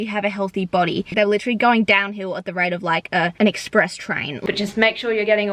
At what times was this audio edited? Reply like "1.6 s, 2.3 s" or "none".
1.1 s, 3.3 s, 4.3 s